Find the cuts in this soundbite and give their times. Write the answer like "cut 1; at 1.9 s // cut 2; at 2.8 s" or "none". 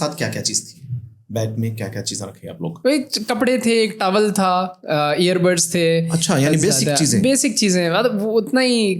cut 1; at 2.7 s

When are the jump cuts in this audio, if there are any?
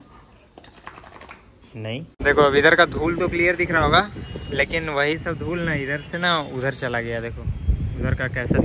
cut 1; at 2.2 s

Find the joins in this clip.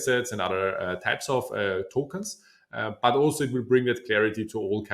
none

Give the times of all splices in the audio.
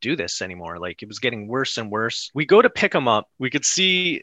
cut 1; at 2.2 s // cut 2; at 3.3 s

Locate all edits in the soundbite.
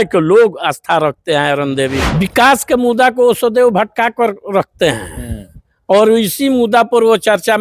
cut 1; at 2.0 s

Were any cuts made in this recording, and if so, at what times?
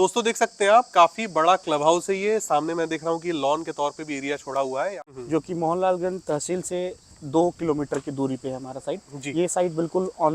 cut 1; at 5.1 s

